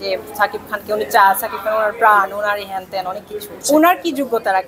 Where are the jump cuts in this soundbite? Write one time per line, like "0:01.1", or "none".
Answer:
none